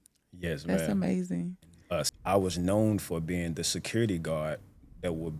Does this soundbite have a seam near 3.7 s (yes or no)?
no